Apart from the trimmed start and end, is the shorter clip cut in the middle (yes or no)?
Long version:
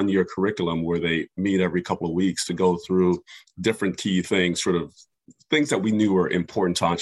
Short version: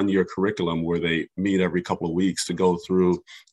no